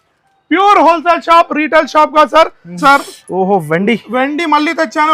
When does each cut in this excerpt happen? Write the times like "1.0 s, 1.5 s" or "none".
2.8 s